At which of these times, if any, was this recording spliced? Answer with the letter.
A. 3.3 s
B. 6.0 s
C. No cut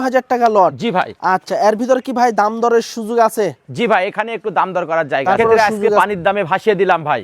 B